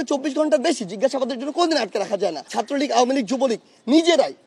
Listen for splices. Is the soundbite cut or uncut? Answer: cut